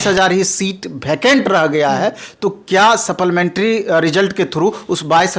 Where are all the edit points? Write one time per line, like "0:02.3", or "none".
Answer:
none